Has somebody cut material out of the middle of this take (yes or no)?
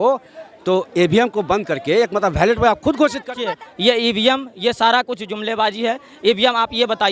yes